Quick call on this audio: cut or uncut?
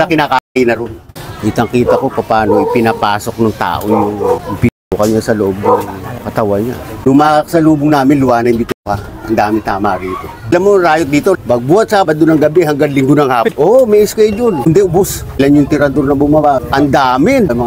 cut